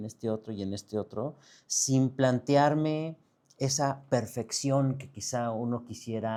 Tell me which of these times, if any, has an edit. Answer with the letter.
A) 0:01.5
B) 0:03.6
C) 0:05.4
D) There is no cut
D